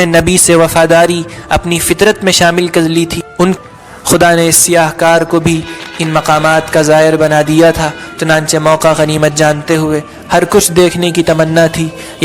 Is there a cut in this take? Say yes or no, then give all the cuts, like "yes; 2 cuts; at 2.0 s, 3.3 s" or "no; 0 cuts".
yes; 1 cut; at 3.6 s